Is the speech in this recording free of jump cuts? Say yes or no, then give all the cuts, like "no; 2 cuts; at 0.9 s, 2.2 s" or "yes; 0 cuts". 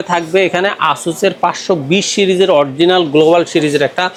yes; 0 cuts